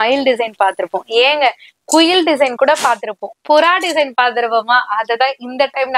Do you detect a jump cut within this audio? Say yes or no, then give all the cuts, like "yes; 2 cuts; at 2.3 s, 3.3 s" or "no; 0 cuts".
no; 0 cuts